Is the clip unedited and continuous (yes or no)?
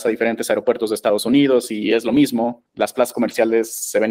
no